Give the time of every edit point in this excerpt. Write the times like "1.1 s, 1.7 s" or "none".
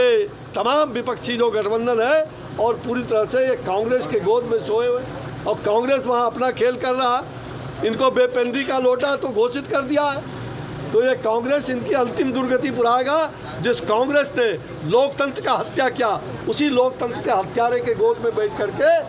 none